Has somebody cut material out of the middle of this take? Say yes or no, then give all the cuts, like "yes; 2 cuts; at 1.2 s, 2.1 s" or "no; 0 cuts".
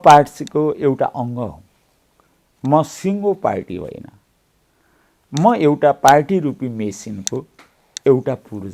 no; 0 cuts